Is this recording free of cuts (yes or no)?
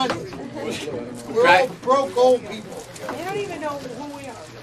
no